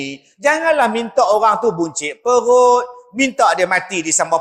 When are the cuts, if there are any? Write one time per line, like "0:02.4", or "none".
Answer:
none